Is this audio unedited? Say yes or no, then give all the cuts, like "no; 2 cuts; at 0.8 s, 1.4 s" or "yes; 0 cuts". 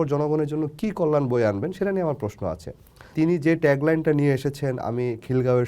no; 1 cut; at 3.1 s